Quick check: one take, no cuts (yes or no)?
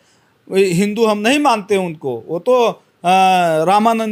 yes